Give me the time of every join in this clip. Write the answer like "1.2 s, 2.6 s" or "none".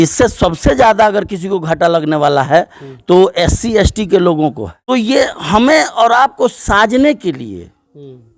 4.7 s